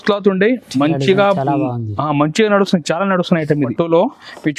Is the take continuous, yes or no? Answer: no